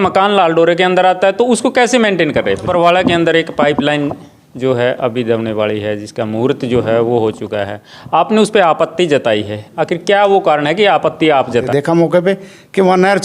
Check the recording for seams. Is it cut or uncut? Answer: cut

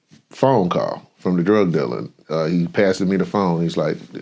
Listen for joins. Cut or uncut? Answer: uncut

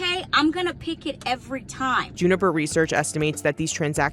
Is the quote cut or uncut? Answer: cut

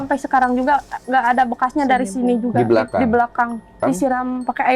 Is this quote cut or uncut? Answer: cut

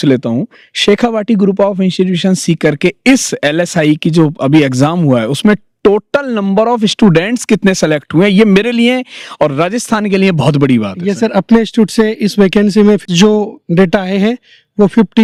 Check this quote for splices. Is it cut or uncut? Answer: uncut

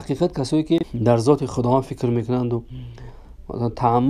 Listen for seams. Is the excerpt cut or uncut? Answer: cut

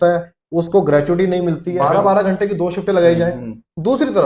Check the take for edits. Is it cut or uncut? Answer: cut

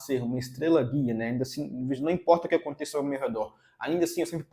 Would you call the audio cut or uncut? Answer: uncut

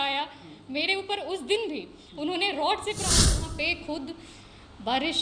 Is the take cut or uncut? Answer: cut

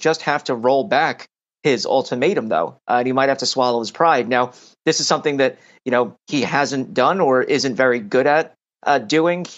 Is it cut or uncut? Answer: uncut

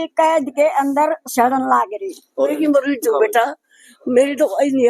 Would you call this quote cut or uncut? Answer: cut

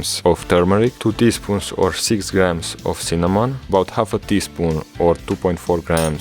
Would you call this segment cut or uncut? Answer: cut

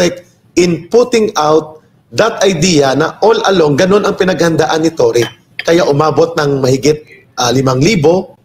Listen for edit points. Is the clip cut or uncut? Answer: uncut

